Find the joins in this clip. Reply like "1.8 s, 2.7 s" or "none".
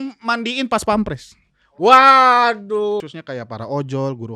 3.0 s